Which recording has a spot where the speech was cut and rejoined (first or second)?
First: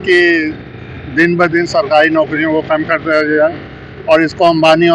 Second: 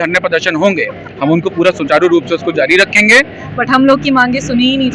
second